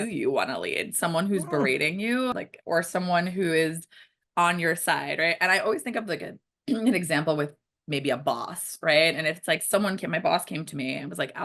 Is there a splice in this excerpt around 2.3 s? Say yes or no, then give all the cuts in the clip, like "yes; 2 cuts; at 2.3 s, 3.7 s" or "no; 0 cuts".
yes; 1 cut; at 2.3 s